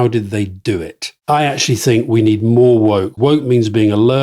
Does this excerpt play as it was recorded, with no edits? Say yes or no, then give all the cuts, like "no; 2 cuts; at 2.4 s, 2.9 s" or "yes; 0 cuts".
no; 2 cuts; at 1.0 s, 3.1 s